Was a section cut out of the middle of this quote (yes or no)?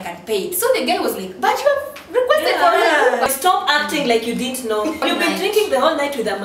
yes